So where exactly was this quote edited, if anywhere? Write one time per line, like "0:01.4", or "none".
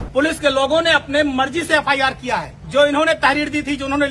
0:02.6